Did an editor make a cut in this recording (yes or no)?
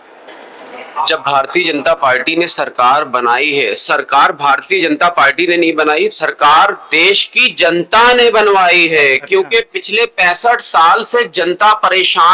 no